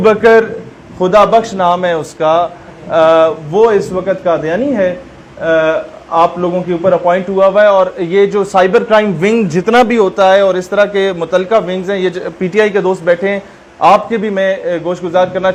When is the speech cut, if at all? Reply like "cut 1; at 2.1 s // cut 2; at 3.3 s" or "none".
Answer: none